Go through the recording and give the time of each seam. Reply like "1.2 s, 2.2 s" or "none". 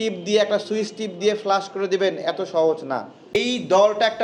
3.3 s